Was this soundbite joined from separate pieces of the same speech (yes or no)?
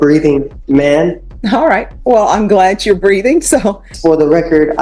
yes